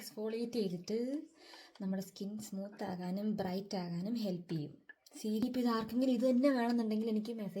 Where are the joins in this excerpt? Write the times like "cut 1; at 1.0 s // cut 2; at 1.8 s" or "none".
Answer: cut 1; at 5.4 s